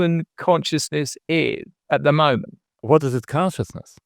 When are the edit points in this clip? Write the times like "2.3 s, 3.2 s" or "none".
1.7 s, 2.8 s